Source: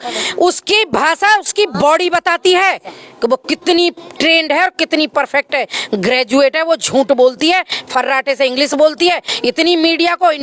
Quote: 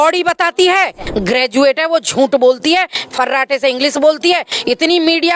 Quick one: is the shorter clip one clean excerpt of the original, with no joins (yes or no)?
no